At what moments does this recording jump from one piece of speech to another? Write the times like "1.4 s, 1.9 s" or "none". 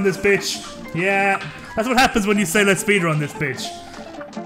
none